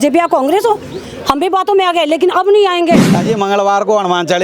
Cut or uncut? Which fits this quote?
cut